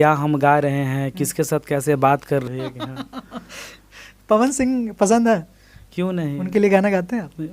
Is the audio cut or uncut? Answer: cut